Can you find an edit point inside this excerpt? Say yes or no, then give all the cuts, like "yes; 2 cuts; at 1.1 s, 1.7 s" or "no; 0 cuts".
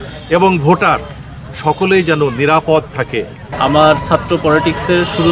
yes; 1 cut; at 3.5 s